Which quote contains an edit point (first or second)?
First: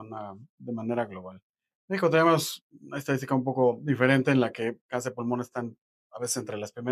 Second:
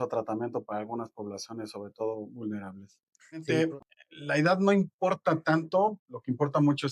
second